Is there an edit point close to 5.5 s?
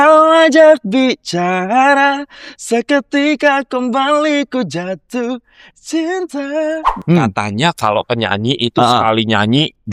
no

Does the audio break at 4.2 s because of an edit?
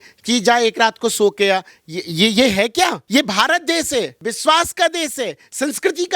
yes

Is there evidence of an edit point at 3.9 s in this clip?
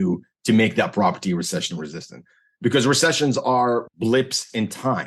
yes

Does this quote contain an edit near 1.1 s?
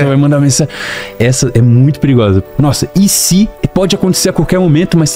no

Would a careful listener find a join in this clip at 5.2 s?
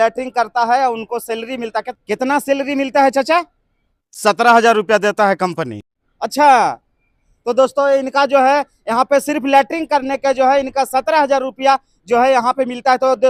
no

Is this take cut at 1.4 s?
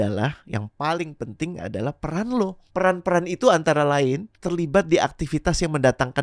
no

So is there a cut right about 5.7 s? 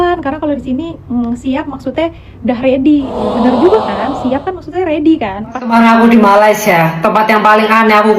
yes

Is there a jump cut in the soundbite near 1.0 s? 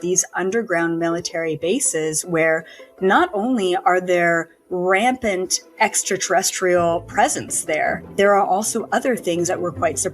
no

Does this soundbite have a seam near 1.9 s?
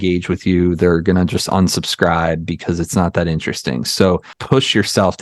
no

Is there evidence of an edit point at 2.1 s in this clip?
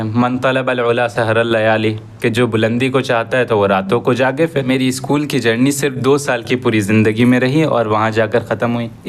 no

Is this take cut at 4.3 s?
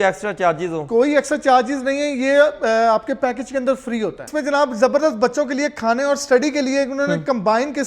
yes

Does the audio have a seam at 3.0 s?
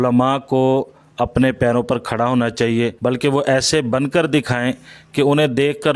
yes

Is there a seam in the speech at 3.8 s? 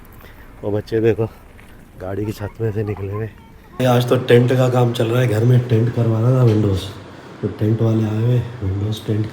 yes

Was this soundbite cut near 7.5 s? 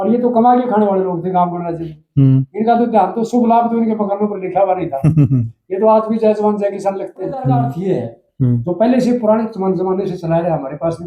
yes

